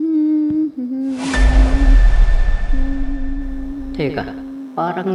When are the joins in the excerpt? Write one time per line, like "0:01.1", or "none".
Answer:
none